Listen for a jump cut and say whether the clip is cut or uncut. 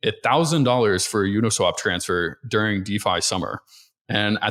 uncut